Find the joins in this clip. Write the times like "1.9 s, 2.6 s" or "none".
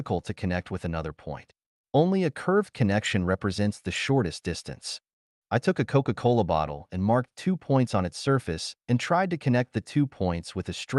none